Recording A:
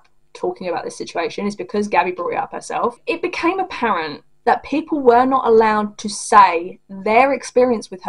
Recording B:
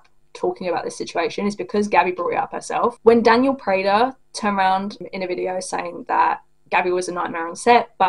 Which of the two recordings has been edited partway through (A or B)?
A